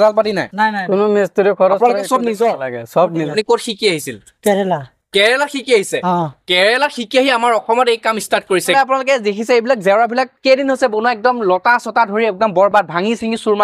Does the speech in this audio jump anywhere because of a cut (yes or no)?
yes